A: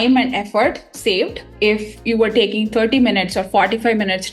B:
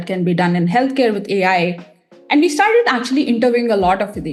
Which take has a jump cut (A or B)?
A